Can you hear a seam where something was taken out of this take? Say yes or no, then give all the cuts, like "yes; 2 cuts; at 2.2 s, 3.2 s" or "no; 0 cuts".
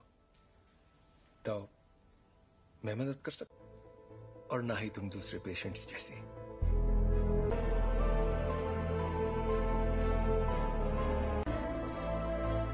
yes; 1 cut; at 7.5 s